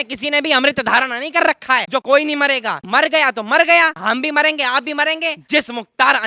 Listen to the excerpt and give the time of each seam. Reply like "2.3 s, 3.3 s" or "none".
2.0 s, 2.8 s, 4.0 s, 5.4 s